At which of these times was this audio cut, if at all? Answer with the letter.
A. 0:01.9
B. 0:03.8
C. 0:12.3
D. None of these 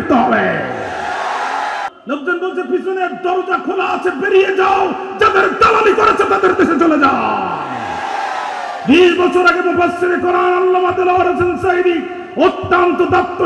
A